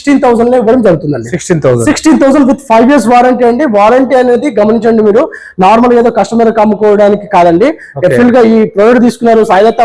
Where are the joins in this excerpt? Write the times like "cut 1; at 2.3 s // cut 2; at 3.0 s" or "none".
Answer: none